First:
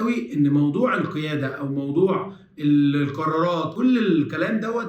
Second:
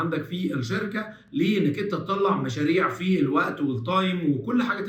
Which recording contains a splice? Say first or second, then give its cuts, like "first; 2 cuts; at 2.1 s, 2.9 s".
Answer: first; 1 cut; at 3.7 s